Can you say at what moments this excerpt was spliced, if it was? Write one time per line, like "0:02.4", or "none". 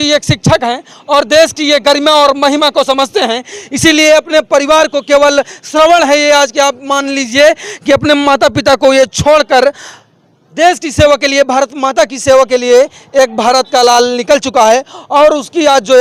none